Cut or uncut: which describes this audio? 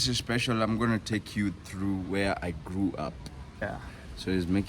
cut